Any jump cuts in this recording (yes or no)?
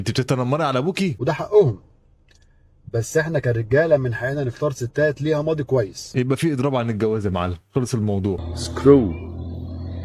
yes